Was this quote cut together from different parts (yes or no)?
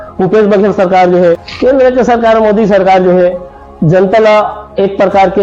yes